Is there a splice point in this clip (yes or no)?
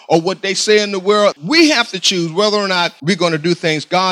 yes